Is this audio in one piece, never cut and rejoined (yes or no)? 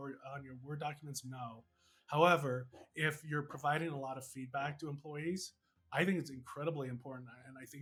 yes